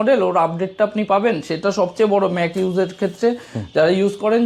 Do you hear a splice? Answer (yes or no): no